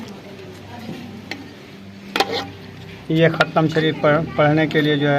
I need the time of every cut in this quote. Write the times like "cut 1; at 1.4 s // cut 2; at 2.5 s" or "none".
cut 1; at 1.9 s